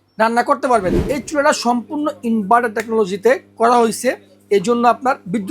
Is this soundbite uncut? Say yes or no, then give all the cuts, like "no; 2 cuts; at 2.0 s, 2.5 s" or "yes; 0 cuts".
no; 1 cut; at 0.9 s